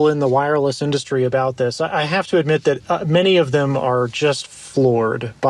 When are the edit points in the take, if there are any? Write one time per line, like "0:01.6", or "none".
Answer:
none